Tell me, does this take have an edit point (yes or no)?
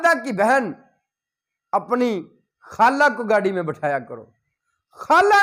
no